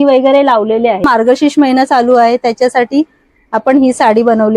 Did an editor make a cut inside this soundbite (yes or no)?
yes